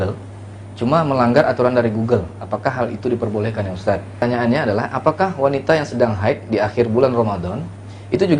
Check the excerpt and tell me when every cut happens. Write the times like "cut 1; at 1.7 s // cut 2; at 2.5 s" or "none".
cut 1; at 4.2 s